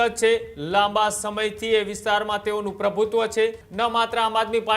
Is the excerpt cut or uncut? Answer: cut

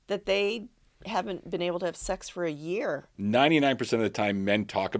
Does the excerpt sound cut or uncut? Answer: cut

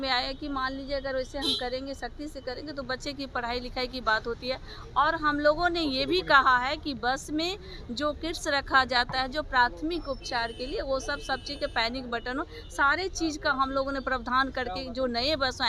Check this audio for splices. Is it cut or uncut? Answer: uncut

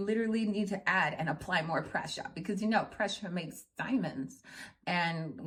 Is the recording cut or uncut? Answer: uncut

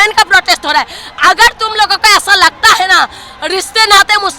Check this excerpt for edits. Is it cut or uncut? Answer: uncut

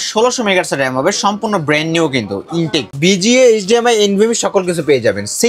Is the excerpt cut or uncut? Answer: cut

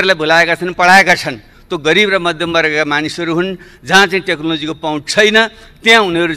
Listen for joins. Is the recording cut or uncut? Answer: uncut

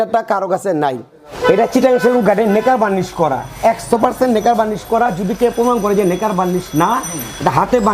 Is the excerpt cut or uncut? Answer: cut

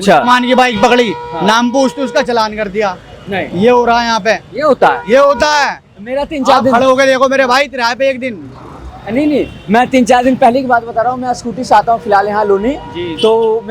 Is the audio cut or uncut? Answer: uncut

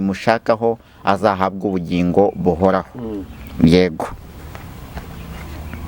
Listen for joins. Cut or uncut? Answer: uncut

